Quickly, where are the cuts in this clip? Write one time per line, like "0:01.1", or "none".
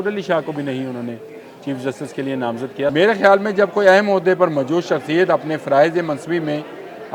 0:02.9